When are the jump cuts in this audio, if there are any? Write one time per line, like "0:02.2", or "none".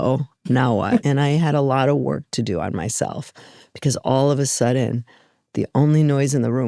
0:01.0